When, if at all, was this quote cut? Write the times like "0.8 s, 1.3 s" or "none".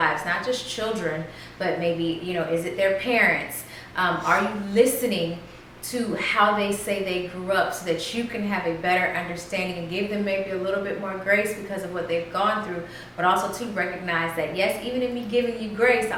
none